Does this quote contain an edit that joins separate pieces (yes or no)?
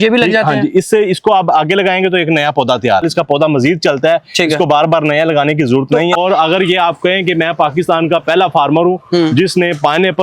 yes